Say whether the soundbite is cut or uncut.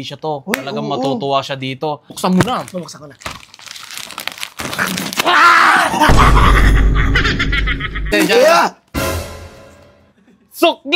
cut